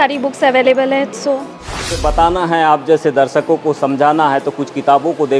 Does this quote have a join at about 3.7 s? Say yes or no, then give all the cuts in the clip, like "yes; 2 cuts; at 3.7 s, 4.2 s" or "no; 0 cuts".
no; 1 cut; at 2.0 s